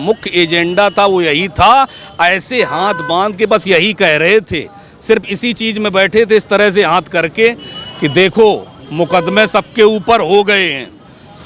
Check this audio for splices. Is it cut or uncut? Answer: uncut